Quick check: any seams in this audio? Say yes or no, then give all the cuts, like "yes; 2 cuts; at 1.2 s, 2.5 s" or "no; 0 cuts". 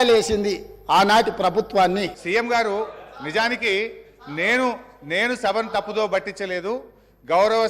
yes; 1 cut; at 2.2 s